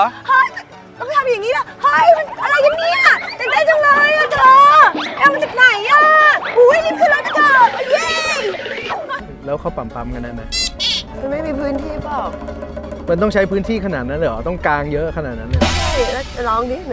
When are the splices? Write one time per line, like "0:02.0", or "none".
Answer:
0:09.3